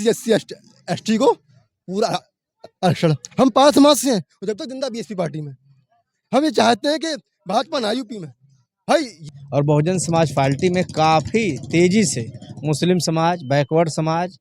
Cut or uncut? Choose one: cut